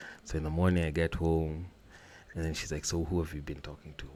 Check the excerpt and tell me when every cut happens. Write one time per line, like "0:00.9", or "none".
none